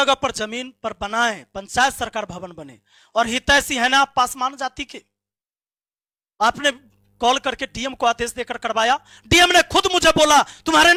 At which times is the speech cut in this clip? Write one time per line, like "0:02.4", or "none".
none